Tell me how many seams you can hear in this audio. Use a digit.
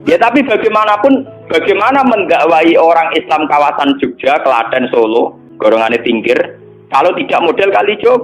1